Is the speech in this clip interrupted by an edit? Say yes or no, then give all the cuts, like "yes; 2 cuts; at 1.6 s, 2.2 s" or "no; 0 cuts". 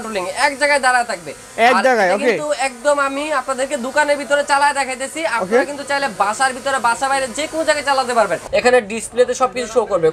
yes; 1 cut; at 8.4 s